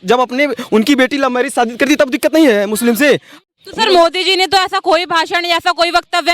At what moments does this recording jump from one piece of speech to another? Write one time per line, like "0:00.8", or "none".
0:03.4